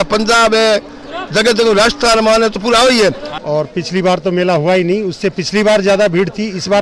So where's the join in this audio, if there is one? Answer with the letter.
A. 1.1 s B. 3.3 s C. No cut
B